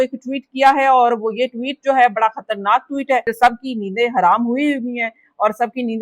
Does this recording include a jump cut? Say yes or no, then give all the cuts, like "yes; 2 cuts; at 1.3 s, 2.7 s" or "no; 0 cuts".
yes; 1 cut; at 3.3 s